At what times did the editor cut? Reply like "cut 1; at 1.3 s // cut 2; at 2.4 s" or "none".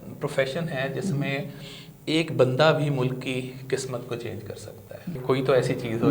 cut 1; at 5.2 s